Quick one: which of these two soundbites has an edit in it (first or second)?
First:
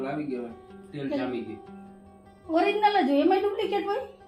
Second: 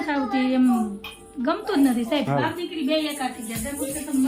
second